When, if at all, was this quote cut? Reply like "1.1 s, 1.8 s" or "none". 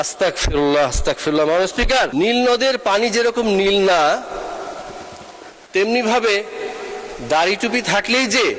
2.1 s